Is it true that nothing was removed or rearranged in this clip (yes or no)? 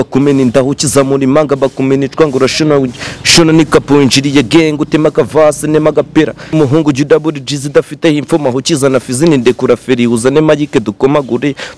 no